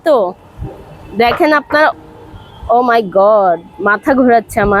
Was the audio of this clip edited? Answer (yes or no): yes